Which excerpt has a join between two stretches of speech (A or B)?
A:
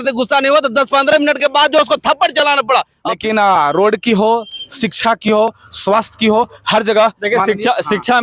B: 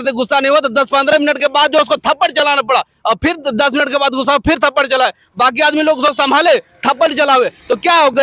A